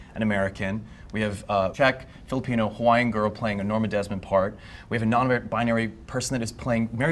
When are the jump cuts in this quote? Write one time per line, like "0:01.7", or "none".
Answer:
0:01.7